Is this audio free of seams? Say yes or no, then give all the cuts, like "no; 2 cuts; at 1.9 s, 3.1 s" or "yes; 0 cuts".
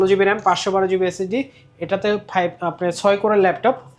yes; 0 cuts